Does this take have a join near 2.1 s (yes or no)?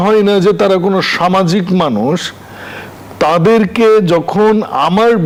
no